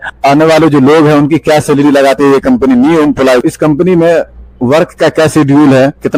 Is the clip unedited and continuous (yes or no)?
yes